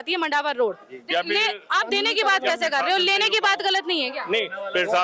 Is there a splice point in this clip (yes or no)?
yes